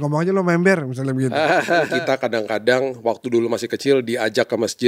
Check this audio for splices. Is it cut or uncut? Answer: cut